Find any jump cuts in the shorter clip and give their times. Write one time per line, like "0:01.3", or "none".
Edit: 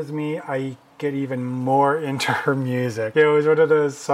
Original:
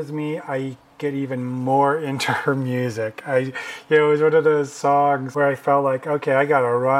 0:03.1